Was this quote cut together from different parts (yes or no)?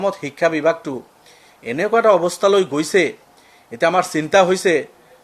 no